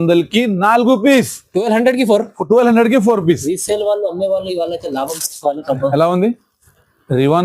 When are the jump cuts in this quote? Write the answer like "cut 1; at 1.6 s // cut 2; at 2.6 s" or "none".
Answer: cut 1; at 5.8 s